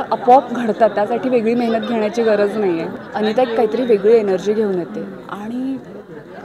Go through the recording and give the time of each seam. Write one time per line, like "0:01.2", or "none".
0:03.0